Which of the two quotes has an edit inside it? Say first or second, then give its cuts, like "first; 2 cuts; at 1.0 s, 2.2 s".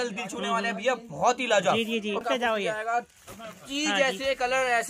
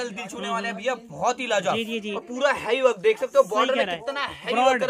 first; 1 cut; at 2.2 s